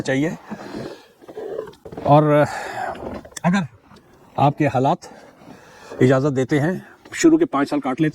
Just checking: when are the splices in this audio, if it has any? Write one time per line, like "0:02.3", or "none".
none